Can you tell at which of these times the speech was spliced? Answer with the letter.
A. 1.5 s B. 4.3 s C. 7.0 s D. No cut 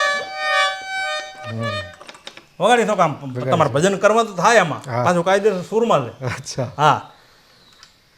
D